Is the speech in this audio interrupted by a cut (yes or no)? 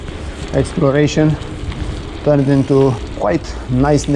no